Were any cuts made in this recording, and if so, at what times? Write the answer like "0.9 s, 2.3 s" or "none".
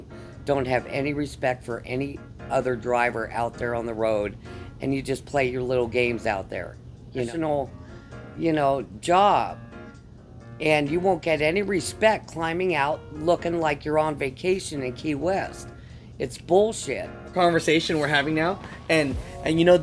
7.3 s, 17.3 s